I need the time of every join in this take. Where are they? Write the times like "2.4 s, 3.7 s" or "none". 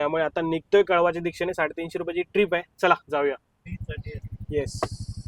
3.5 s